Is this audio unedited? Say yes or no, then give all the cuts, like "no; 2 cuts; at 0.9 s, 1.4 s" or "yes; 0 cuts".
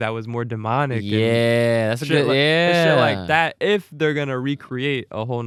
yes; 0 cuts